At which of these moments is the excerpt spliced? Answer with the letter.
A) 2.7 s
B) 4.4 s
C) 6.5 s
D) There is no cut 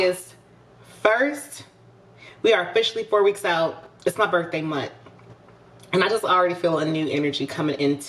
D